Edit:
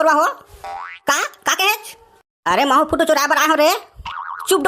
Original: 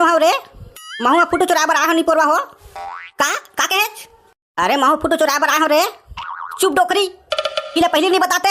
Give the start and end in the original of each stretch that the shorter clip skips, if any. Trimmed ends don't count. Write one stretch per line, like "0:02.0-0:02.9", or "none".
none